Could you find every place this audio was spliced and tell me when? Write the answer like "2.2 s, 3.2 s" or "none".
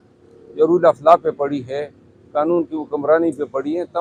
none

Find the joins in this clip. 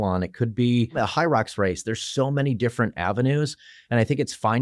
0.9 s

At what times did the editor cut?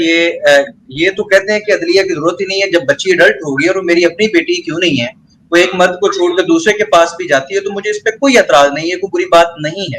none

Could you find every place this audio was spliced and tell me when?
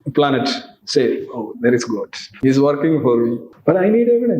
2.2 s, 3.5 s

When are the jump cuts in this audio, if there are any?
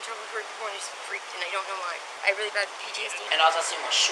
0.9 s, 2.1 s, 3.2 s

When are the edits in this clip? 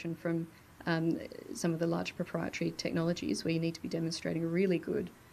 none

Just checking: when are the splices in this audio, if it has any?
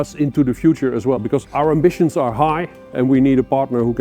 1.5 s, 2.8 s

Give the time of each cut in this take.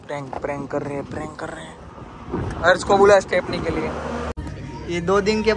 4.3 s

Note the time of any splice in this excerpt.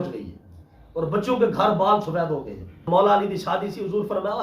2.8 s

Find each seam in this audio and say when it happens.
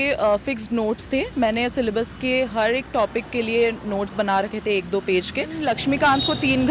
5.6 s

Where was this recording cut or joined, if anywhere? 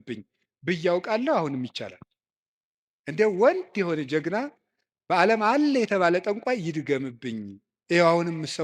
7.7 s

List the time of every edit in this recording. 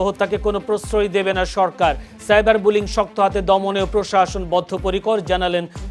none

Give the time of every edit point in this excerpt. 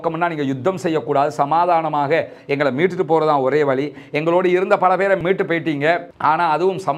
none

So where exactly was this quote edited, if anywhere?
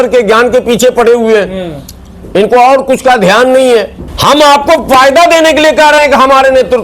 4.0 s

